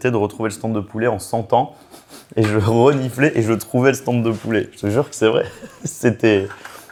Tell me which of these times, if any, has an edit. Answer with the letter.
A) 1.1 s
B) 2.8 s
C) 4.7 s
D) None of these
D